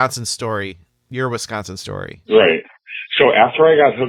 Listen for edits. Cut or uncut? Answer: uncut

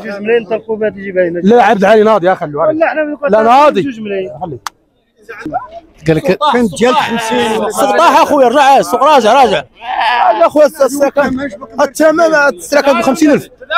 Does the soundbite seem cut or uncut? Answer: cut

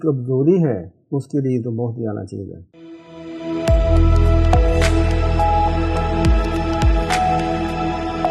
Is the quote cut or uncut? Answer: uncut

